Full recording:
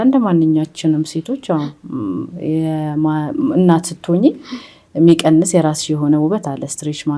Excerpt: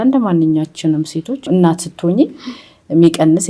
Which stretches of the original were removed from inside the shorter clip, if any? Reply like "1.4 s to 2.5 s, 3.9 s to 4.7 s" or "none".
1.5 s to 3.5 s